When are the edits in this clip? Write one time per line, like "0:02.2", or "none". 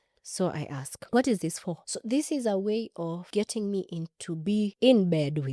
0:03.2
0:04.7